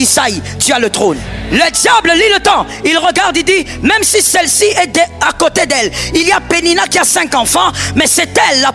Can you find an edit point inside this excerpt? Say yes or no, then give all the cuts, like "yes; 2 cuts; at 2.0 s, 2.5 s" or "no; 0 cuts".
yes; 1 cut; at 1.3 s